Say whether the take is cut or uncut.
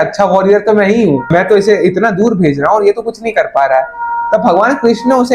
uncut